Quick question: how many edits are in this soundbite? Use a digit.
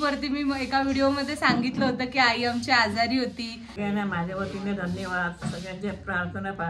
1